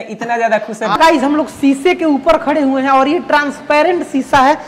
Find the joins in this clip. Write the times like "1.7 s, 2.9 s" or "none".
1.0 s